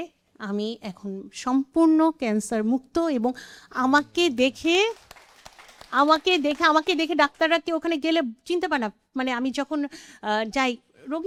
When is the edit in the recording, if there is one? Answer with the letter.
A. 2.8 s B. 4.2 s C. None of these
C